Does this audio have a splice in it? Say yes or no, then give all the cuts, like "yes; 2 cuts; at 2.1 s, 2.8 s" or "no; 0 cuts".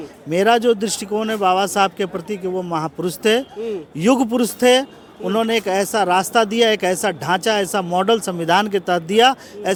no; 0 cuts